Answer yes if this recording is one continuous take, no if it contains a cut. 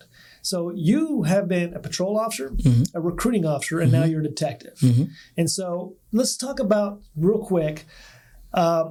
yes